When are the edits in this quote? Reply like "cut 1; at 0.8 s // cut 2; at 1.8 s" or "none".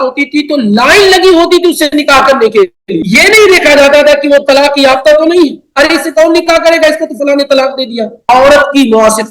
cut 1; at 2.9 s // cut 2; at 8.2 s